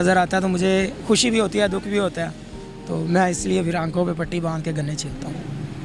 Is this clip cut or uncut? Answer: uncut